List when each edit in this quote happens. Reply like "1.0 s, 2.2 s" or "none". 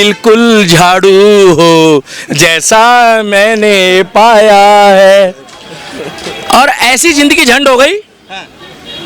none